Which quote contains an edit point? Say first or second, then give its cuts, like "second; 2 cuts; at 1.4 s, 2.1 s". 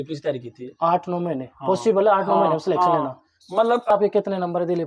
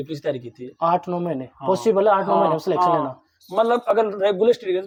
first; 1 cut; at 3.9 s